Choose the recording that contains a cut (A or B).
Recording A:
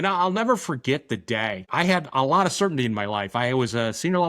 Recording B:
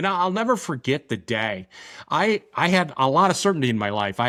A